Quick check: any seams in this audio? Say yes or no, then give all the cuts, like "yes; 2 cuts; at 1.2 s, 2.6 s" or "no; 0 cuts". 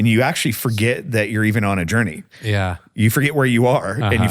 no; 0 cuts